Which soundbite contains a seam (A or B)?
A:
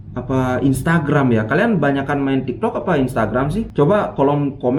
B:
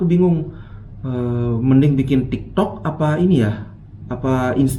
A